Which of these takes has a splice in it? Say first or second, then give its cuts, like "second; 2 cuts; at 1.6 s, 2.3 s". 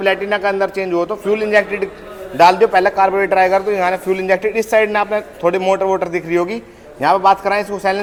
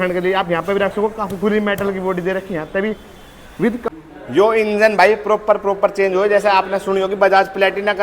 second; 1 cut; at 4.0 s